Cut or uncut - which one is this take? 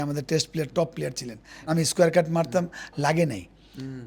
cut